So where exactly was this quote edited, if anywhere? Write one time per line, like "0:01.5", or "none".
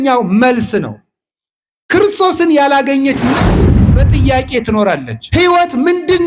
0:05.1